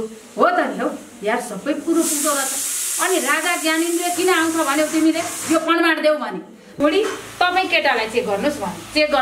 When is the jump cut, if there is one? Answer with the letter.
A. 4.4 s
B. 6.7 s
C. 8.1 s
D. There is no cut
B